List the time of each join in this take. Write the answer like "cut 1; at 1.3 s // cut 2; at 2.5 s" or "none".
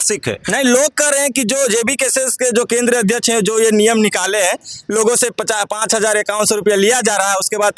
none